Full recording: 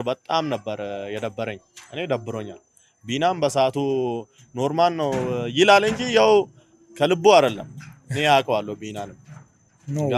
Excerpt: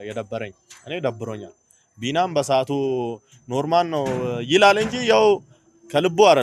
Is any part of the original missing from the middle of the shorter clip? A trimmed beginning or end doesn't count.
no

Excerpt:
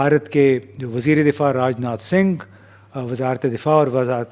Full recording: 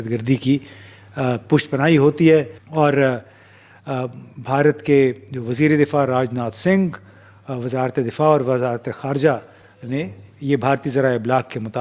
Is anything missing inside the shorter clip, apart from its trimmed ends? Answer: no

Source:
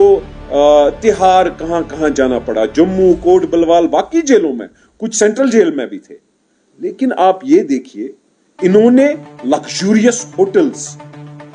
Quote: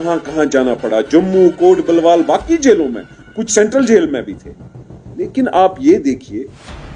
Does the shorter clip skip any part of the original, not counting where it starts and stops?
no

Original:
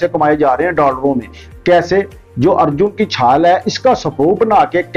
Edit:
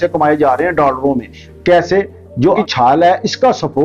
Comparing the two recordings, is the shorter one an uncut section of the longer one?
no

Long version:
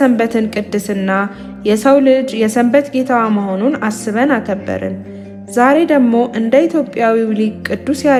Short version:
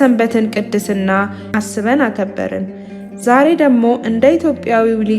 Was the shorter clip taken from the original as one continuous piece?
no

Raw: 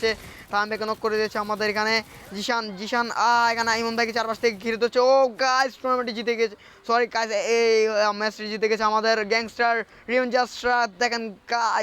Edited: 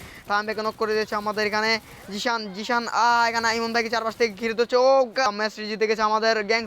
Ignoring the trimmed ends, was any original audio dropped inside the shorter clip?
yes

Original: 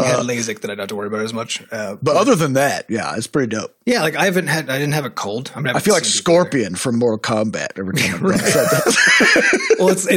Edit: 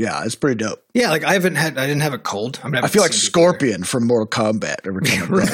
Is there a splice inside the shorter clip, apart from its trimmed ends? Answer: no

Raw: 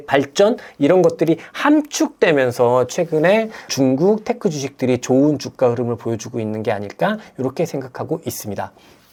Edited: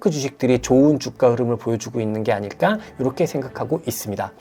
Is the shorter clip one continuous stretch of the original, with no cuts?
yes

